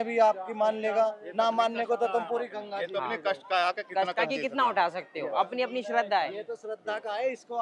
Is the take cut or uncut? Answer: uncut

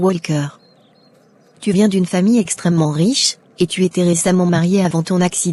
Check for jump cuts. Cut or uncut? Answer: uncut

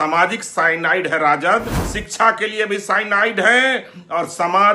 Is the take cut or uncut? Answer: cut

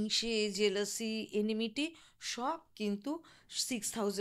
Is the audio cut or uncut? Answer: uncut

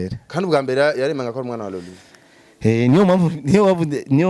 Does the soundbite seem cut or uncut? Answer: uncut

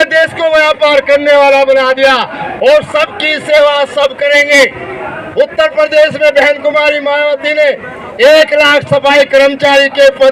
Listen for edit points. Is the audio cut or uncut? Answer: uncut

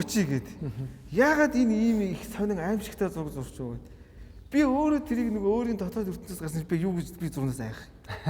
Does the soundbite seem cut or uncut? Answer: uncut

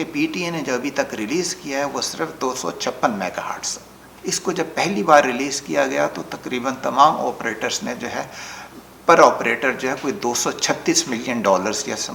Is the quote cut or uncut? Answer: uncut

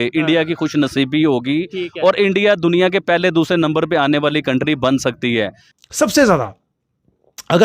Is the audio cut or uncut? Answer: cut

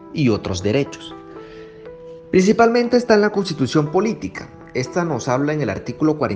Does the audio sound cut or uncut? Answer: cut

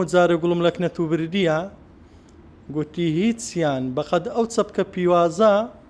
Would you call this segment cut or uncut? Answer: uncut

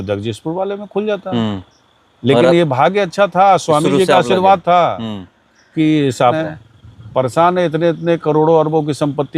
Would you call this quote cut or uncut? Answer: cut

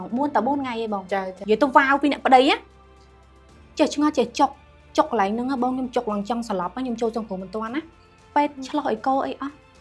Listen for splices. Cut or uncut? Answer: cut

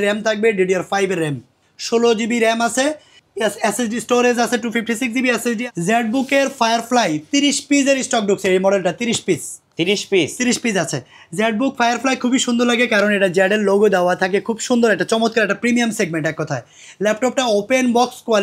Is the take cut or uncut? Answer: cut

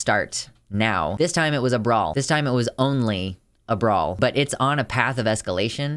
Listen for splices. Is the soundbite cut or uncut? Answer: cut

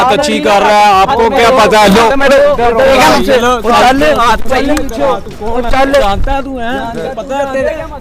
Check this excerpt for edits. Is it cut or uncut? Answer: uncut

